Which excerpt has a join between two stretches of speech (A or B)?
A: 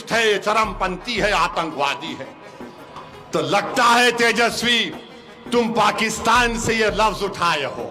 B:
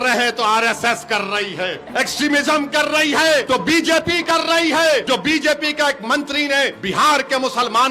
B